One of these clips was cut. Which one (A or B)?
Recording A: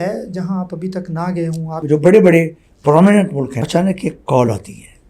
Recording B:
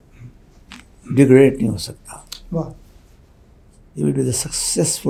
A